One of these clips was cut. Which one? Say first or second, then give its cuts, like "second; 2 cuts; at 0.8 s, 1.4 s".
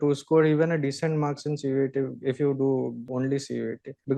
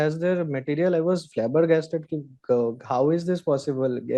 first; 1 cut; at 3.1 s